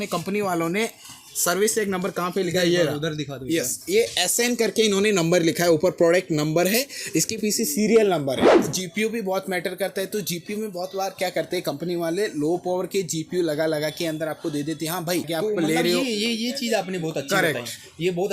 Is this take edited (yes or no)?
yes